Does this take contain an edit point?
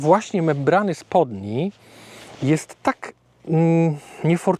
no; 0 cuts

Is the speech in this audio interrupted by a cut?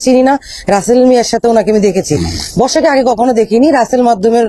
no; 0 cuts

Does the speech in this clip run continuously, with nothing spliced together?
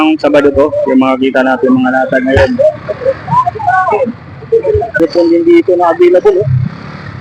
no; 1 cut; at 5.0 s

